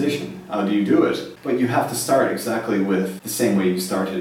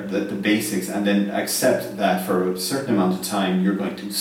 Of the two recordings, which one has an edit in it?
first; 2 cuts; at 1.3 s, 3.2 s

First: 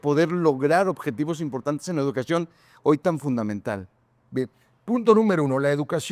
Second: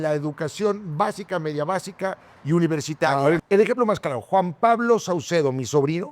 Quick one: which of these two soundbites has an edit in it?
second; 1 cut; at 3.4 s

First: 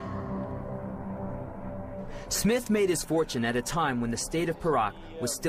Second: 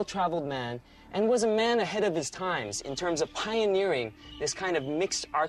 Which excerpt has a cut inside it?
first; 1 cut; at 1.2 s

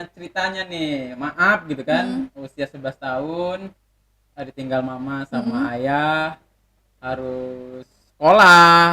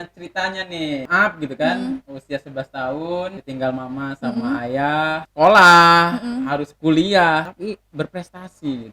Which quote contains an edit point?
second; 4 cuts; at 1.1 s, 3.4 s, 5.3 s, 7.5 s

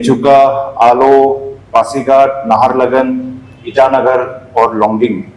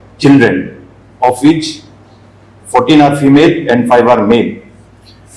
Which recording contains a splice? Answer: second; 1 cut; at 2.5 s

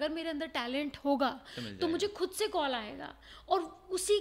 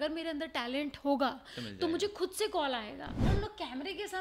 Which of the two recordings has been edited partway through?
second; 1 cut; at 3.3 s

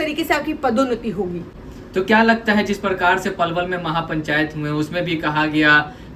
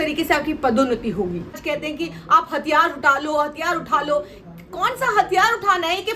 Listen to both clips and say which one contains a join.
second; 1 cut; at 1.6 s

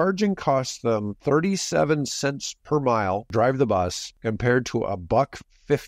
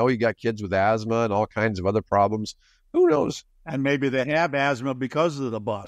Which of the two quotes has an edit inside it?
first; 3 cuts; at 1.1 s, 3.3 s, 4.1 s

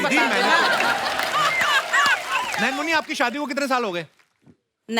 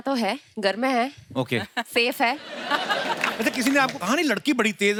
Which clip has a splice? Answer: first; 1 cut; at 2.5 s

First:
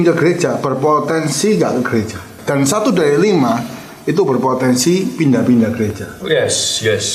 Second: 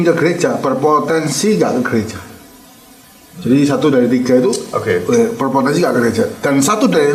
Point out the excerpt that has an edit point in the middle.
first; 1 cut; at 2.4 s

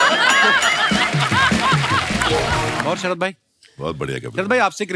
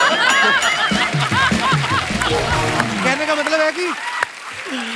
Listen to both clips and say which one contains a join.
first; 1 cut; at 2.8 s

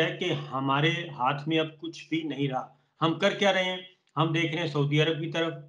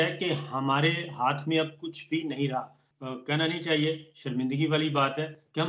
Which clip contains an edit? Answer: second; 1 cut; at 2.8 s

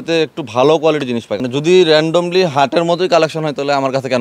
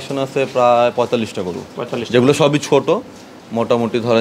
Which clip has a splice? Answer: first; 1 cut; at 1.3 s

